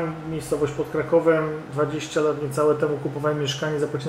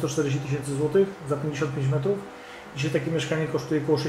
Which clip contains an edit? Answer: first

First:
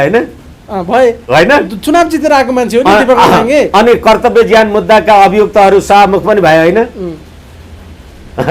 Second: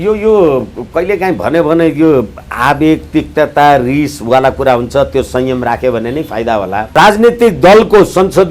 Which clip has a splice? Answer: second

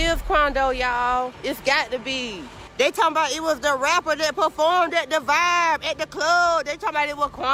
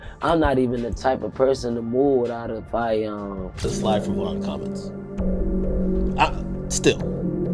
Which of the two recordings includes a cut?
second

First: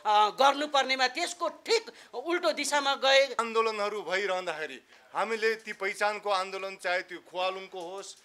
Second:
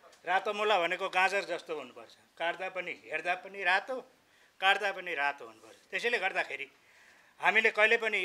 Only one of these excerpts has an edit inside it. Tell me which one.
first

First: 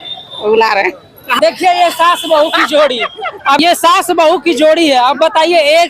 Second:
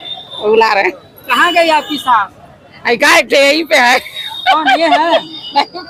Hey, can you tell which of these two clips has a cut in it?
first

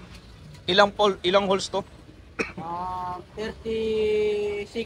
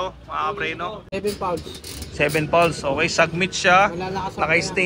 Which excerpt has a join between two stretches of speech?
second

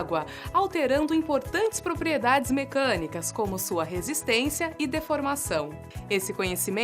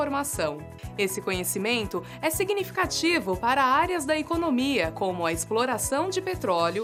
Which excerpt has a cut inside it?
first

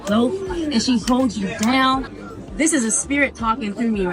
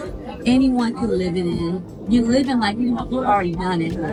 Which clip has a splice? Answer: first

